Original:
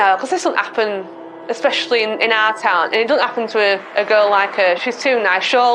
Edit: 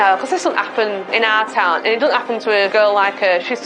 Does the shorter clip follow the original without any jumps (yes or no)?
no